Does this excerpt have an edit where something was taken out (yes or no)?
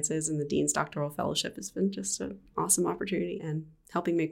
yes